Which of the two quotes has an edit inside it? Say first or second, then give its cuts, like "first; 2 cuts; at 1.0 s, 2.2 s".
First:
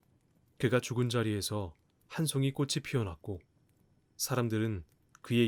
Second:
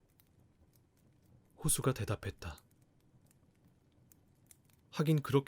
second; 2 cuts; at 2.6 s, 4.8 s